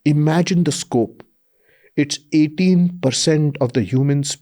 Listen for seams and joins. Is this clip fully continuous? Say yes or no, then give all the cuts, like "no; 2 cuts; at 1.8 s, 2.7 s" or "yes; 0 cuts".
yes; 0 cuts